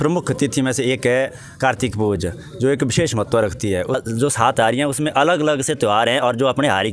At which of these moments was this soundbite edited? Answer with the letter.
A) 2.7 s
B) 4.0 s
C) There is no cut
B